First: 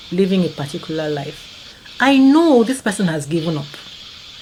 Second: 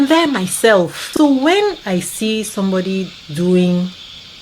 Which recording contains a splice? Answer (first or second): second